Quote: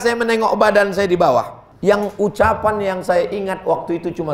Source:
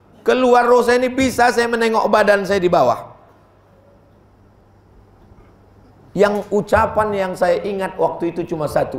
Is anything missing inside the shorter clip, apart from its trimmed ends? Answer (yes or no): yes